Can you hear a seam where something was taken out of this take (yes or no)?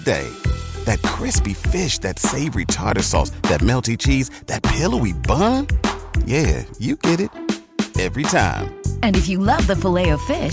no